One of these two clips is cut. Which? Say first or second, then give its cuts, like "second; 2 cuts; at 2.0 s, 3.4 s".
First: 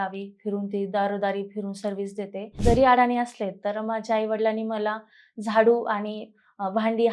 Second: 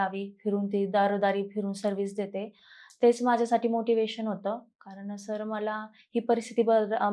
first; 1 cut; at 2.6 s